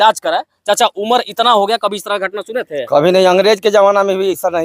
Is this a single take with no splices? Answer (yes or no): yes